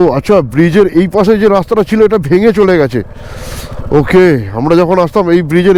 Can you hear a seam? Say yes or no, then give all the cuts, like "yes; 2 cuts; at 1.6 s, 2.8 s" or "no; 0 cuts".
no; 0 cuts